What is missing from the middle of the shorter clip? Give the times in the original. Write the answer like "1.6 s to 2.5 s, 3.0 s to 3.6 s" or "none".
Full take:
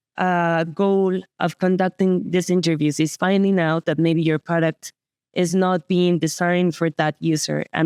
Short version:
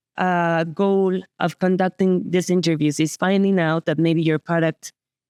none